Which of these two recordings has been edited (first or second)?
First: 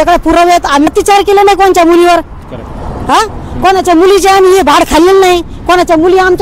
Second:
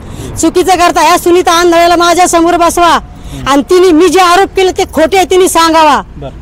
first